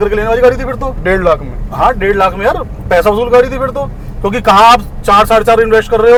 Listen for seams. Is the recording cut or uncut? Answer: uncut